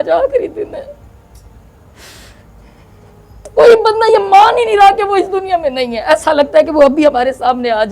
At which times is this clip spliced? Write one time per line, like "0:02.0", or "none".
0:03.5